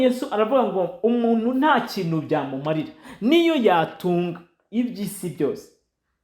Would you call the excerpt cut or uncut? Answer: uncut